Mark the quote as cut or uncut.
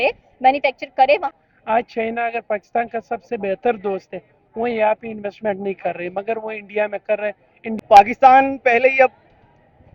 cut